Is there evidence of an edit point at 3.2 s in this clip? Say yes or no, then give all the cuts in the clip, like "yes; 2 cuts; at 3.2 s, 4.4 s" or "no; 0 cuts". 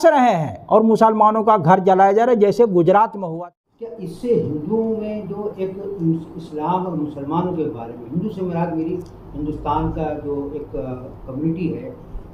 yes; 1 cut; at 3.2 s